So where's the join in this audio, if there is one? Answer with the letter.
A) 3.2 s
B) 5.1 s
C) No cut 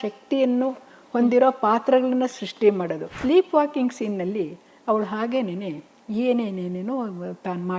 A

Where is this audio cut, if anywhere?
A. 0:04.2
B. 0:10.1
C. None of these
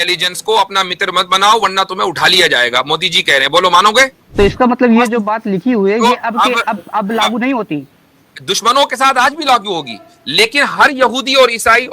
A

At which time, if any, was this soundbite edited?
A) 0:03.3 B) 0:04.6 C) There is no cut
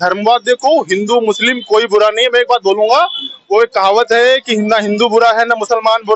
C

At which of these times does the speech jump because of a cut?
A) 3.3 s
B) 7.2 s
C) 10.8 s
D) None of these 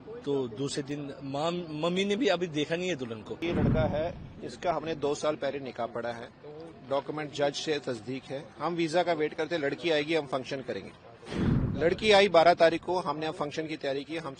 A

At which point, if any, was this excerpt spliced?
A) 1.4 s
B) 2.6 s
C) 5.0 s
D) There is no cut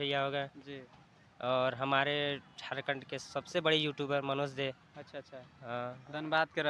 D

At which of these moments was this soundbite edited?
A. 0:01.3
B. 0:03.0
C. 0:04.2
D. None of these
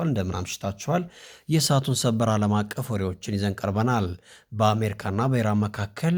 D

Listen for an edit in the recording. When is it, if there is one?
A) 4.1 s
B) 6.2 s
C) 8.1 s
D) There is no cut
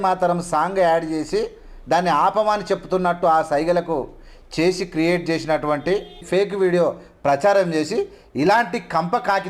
B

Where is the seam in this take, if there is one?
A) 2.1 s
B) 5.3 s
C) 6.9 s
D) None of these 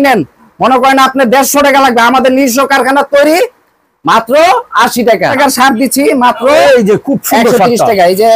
B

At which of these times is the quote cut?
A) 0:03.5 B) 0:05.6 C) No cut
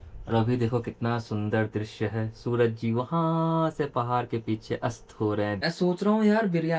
B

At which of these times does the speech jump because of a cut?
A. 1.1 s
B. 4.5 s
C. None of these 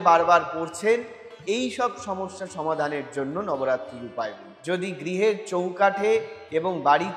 B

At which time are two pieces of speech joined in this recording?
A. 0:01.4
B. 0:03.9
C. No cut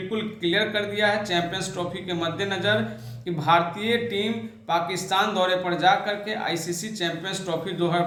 C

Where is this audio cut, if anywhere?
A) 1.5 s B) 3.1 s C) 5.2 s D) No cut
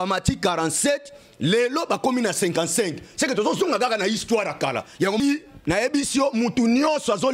C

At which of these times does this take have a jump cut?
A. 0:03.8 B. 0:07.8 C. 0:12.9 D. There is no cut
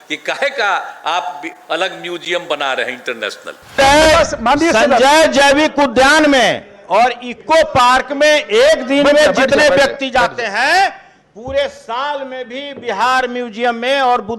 A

